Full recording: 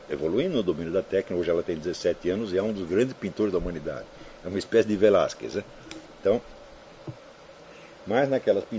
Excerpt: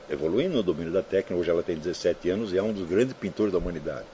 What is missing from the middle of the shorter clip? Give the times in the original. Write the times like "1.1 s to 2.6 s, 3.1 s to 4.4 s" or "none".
none

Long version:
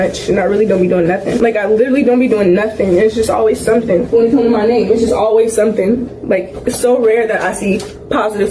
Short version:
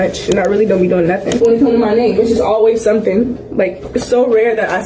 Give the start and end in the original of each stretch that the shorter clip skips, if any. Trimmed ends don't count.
1.4 s to 4.1 s

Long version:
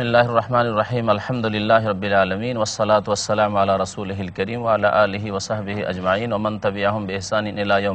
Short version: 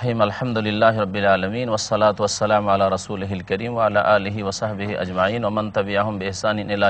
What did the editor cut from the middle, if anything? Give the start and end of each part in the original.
none

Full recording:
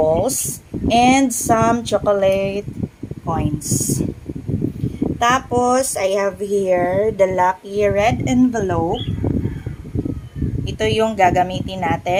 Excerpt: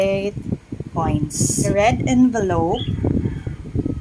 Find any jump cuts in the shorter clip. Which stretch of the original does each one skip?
4.0 s to 7.9 s

